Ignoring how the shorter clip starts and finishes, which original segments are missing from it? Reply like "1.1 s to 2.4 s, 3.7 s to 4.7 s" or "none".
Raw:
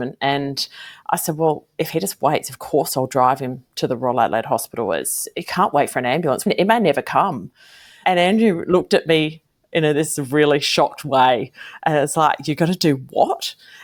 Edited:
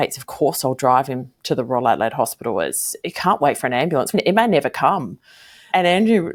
none